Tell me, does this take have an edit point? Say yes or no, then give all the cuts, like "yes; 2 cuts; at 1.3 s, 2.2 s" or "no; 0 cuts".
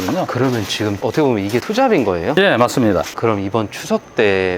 yes; 1 cut; at 3.1 s